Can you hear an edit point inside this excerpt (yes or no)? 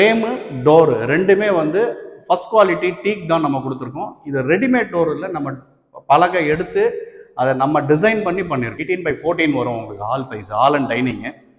yes